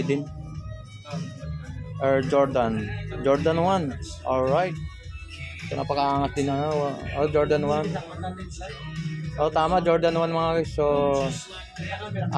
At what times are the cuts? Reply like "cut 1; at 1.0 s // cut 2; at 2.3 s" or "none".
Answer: none